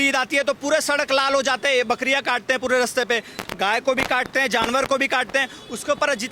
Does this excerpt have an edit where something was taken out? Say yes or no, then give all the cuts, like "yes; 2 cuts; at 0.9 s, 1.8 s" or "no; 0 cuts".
no; 0 cuts